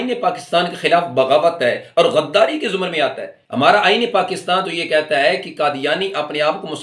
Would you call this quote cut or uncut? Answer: uncut